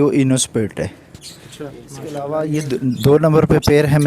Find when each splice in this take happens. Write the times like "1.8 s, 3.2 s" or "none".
2.0 s